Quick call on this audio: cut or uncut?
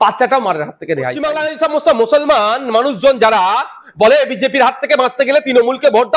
cut